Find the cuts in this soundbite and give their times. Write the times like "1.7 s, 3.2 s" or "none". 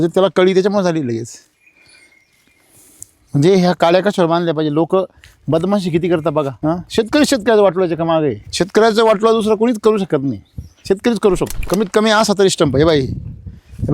6.5 s, 8.4 s, 11.6 s